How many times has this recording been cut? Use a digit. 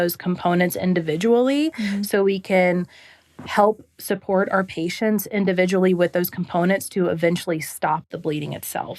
1